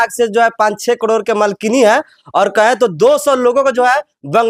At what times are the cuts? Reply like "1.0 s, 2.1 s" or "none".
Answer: none